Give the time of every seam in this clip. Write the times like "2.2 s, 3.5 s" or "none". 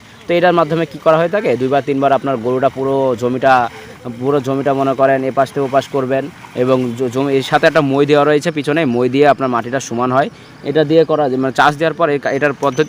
none